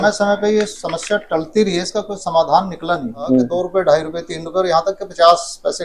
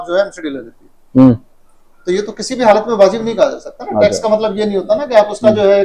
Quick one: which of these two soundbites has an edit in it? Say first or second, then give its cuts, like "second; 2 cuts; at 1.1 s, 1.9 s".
first; 1 cut; at 3.5 s